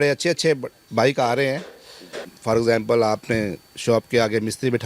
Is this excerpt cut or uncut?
cut